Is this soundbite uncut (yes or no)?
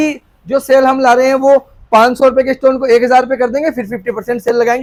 yes